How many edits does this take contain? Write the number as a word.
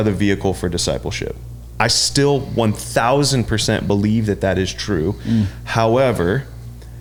zero